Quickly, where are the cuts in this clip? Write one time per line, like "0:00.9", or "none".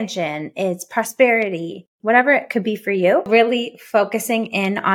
0:03.3